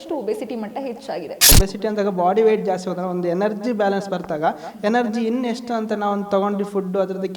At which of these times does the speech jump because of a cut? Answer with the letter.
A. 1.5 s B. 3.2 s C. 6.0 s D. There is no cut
A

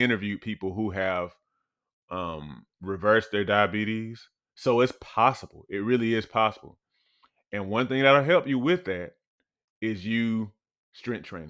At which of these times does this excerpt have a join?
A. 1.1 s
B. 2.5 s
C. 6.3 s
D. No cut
D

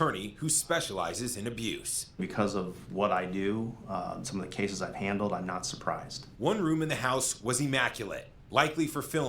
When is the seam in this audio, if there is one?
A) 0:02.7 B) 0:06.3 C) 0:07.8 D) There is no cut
C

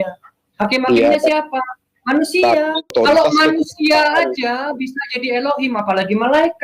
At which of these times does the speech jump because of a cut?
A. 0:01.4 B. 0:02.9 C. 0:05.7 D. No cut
B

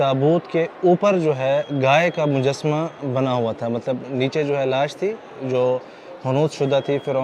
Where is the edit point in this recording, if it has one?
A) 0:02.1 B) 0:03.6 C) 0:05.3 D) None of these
D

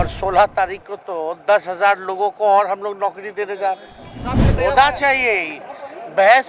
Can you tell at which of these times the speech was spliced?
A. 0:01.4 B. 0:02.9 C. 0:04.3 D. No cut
C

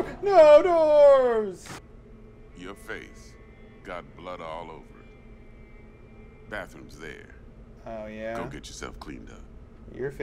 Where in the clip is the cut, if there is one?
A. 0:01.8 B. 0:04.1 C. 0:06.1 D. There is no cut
A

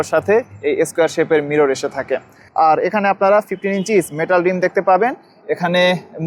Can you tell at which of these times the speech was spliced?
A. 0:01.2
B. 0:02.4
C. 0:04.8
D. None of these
D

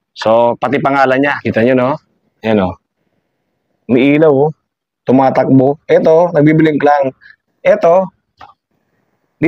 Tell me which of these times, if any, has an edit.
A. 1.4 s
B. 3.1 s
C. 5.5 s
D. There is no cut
A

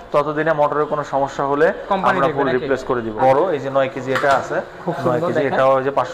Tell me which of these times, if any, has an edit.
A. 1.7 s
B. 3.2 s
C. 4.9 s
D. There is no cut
B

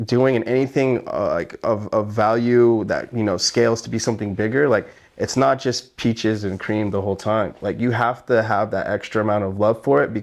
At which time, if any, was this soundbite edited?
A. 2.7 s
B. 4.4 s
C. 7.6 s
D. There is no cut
D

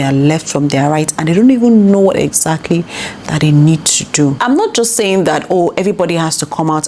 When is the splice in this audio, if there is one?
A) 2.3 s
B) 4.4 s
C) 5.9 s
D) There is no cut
B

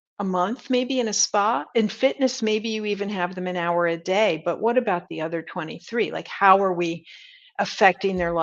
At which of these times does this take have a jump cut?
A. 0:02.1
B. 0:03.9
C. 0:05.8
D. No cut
D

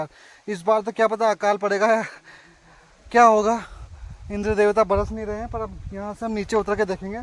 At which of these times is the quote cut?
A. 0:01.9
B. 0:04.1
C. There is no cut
B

